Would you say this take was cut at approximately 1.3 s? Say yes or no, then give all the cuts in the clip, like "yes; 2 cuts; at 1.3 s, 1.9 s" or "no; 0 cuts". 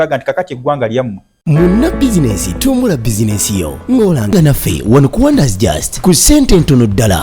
yes; 1 cut; at 1.3 s